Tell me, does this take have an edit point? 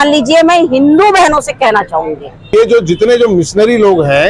yes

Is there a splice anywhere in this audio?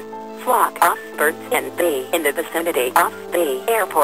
no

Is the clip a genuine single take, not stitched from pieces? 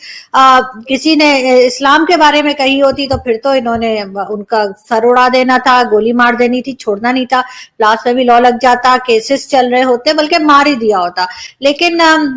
yes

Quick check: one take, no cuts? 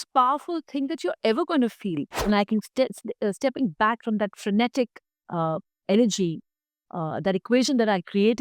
no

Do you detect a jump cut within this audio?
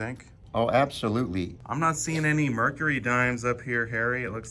yes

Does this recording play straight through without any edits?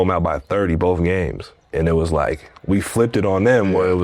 yes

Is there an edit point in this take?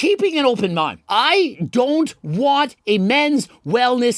yes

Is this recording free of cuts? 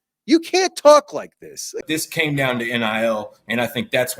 no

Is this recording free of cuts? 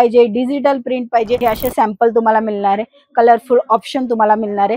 no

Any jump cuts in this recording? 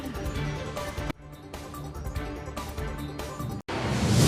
no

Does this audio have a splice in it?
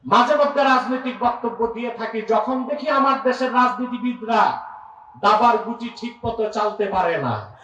no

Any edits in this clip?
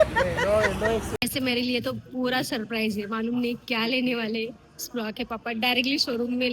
yes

